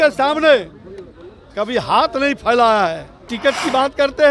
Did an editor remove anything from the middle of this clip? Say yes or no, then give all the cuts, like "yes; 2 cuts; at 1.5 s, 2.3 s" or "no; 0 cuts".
yes; 1 cut; at 3.3 s